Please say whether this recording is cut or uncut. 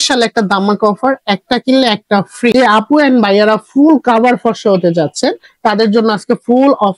cut